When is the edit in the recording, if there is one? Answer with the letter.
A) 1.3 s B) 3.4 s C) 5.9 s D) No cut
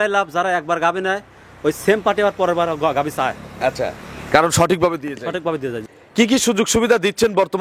C